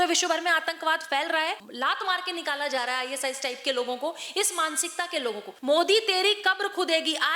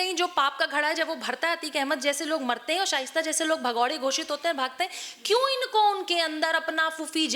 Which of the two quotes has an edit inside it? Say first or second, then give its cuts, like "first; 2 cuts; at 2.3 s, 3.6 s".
first; 2 cuts; at 1.7 s, 5.5 s